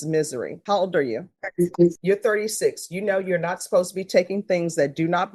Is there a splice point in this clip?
no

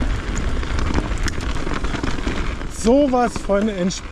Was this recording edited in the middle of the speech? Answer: no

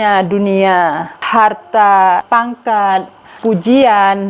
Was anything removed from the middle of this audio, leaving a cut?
yes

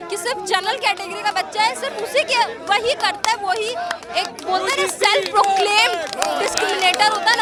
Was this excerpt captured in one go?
yes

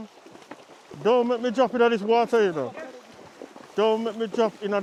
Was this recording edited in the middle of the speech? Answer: no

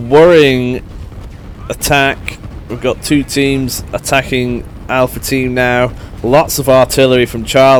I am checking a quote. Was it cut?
no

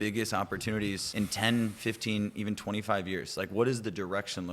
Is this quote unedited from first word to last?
no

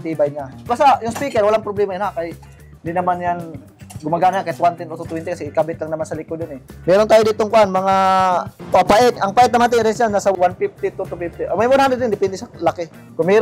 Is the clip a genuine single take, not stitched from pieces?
yes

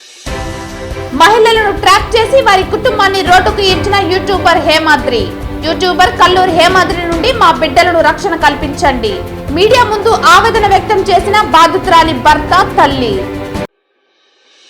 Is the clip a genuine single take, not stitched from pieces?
no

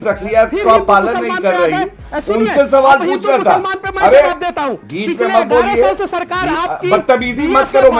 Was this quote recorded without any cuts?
yes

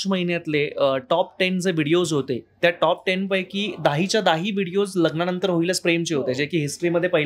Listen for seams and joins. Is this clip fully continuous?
yes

